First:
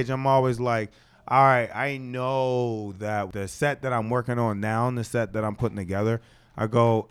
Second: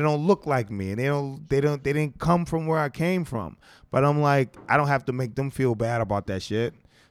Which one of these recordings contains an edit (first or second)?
first